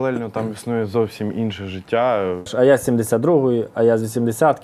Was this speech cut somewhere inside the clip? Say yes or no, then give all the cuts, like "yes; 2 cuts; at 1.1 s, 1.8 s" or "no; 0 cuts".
yes; 1 cut; at 2.5 s